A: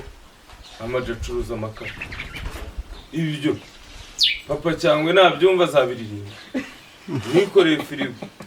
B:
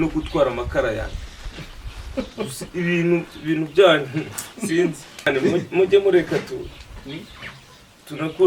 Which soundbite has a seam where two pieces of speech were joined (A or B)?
B